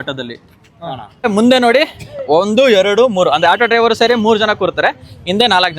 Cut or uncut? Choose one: cut